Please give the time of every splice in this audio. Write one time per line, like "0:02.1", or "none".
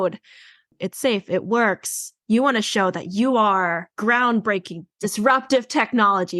0:02.1
0:03.9
0:05.0